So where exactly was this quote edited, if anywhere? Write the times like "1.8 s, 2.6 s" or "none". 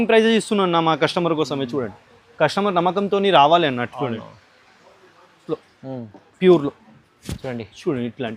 5.4 s